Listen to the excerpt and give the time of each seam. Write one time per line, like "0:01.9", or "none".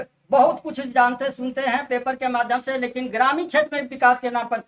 none